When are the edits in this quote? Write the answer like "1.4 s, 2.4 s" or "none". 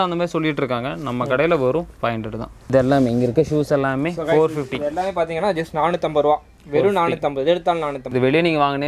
2.5 s, 8.1 s